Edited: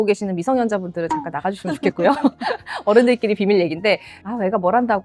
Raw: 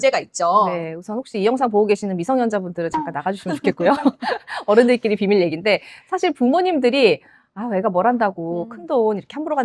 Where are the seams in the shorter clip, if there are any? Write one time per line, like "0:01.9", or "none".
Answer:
0:04.1